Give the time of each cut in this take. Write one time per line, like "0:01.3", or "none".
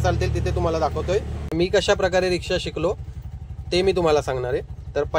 0:01.5